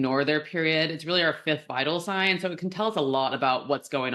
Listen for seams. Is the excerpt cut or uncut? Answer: uncut